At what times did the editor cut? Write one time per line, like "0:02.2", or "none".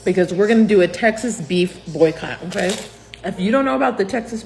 none

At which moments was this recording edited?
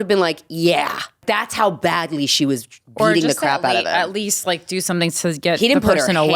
0:01.2

